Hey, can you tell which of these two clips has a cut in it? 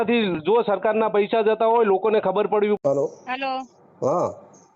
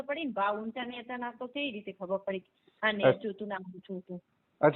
first; 1 cut; at 2.8 s

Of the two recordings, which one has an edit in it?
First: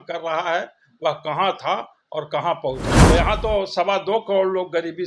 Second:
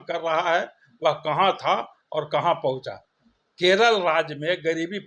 first; 1 cut; at 2.9 s

